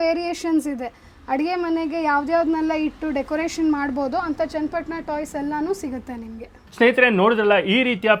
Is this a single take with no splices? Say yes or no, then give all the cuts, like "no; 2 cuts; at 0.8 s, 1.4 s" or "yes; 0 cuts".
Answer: yes; 0 cuts